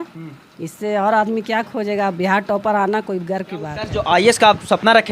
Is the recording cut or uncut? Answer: cut